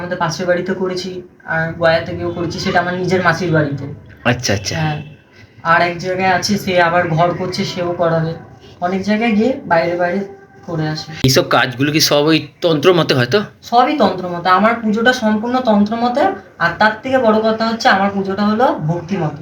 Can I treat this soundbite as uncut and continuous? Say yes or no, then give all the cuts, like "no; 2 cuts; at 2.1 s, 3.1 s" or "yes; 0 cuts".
no; 1 cut; at 11.2 s